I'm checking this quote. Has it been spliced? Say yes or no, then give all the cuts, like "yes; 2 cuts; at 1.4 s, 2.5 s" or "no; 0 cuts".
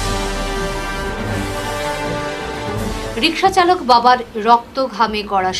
no; 0 cuts